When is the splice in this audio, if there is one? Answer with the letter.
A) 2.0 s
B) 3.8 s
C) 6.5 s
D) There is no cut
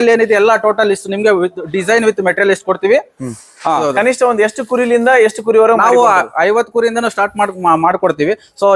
B